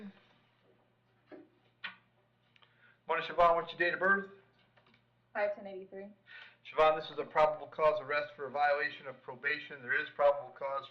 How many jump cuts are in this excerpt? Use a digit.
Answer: 0